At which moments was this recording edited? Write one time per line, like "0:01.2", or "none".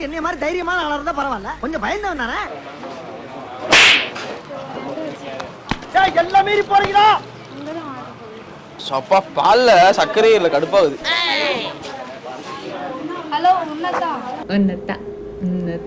0:02.5